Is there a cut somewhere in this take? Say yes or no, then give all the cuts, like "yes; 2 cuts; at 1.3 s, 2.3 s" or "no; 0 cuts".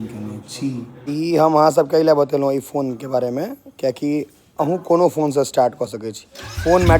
yes; 1 cut; at 0.9 s